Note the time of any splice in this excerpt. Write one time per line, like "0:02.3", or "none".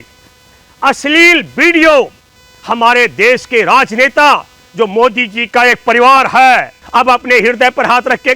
0:06.8